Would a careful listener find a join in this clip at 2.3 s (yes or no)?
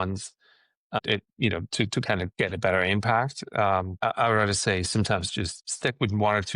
yes